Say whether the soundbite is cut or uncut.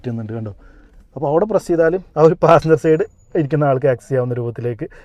uncut